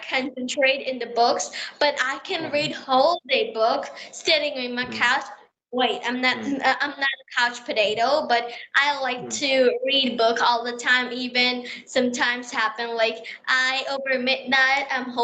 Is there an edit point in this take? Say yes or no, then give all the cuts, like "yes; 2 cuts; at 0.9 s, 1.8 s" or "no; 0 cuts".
no; 0 cuts